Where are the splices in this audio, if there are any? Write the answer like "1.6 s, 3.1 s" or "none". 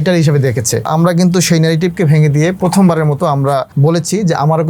0.9 s, 3.7 s